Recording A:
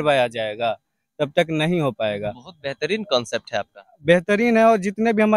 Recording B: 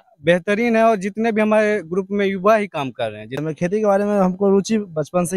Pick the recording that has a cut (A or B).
B